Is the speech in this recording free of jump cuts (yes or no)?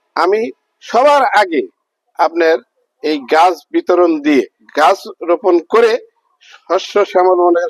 no